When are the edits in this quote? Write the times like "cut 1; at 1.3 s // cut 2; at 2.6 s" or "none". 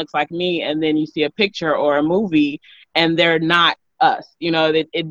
none

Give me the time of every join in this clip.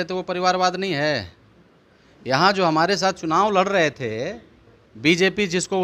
none

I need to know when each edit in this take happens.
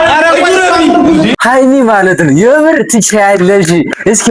cut 1; at 1.3 s

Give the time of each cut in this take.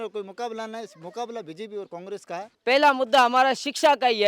cut 1; at 2.5 s

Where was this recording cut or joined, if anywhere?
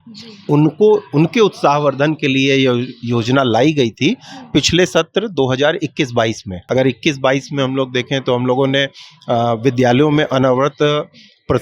cut 1; at 6.5 s

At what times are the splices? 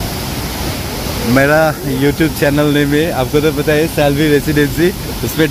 none

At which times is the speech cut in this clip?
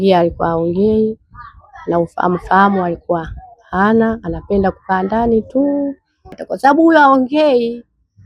cut 1; at 6.5 s

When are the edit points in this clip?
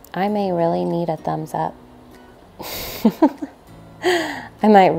none

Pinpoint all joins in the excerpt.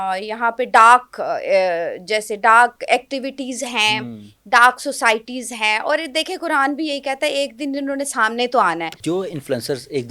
cut 1; at 8.9 s

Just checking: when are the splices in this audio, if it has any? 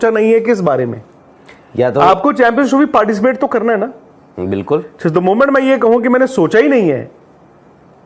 none

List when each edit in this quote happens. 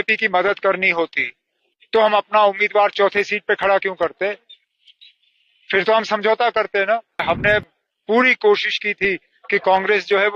cut 1; at 7.2 s

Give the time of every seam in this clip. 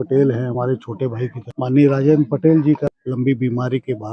cut 1; at 1.4 s // cut 2; at 3.0 s

